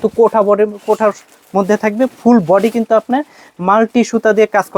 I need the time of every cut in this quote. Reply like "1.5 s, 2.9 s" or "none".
none